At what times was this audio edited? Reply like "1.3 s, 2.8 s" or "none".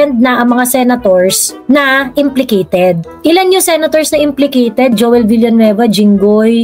none